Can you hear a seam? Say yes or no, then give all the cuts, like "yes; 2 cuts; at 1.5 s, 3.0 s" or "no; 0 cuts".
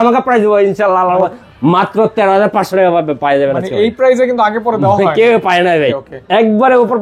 yes; 2 cuts; at 1.3 s, 6.1 s